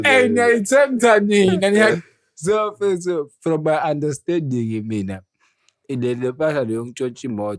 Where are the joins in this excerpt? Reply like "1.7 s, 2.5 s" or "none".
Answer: 2.0 s